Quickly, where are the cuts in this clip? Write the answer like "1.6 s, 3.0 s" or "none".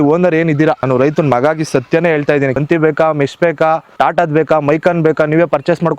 0.8 s, 2.6 s, 3.9 s